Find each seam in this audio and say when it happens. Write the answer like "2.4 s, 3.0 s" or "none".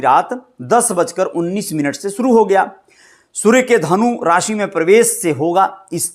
none